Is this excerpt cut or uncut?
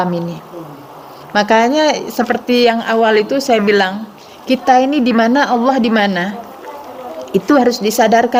uncut